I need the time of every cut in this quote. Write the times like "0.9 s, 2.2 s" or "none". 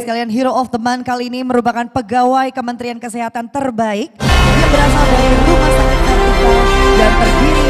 none